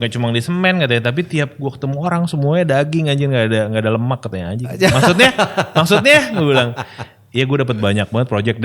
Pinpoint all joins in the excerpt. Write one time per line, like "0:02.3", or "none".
none